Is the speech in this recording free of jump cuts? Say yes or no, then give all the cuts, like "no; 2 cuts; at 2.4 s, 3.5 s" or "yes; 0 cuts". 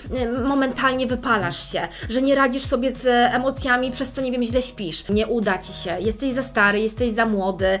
no; 1 cut; at 5.1 s